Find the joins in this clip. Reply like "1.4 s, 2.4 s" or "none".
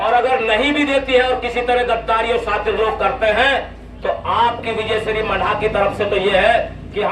none